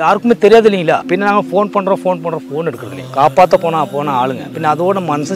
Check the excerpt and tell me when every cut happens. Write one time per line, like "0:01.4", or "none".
0:01.0
0:02.9
0:04.5